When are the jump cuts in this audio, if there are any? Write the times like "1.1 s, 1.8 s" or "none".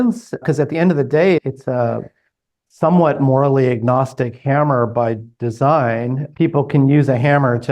none